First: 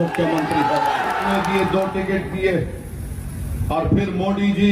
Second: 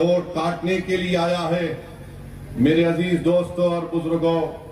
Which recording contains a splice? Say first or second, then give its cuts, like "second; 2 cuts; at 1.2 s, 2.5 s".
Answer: first; 1 cut; at 1.4 s